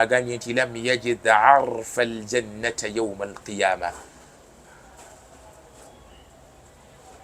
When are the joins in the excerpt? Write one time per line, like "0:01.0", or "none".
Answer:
none